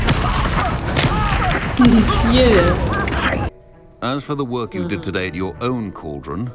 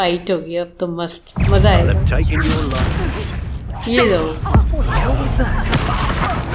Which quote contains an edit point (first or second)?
first